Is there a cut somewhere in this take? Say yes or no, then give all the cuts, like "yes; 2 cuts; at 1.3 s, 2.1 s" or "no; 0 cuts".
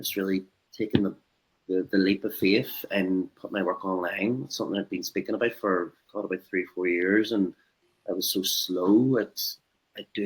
no; 0 cuts